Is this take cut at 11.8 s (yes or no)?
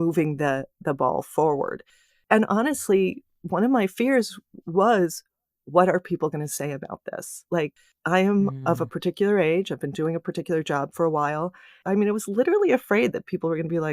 yes